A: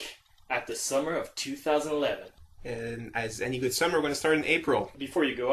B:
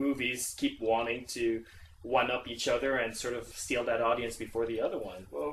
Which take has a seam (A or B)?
A